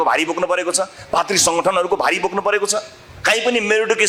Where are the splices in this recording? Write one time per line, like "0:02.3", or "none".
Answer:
none